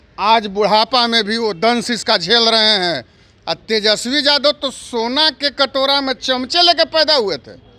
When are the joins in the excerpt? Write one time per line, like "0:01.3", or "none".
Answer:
none